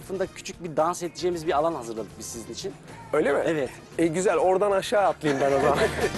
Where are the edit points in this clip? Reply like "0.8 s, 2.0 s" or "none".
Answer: none